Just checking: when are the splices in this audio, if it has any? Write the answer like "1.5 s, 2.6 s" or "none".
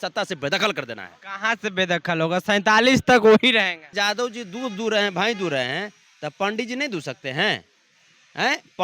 3.9 s